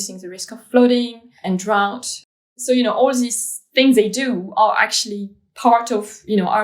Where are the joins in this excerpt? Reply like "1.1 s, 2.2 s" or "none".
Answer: 1.3 s, 2.3 s